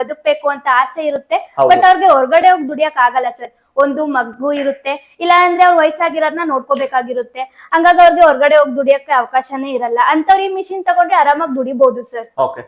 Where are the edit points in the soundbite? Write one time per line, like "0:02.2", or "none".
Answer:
none